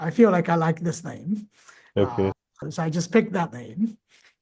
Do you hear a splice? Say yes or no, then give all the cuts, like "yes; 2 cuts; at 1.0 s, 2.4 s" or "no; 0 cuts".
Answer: no; 0 cuts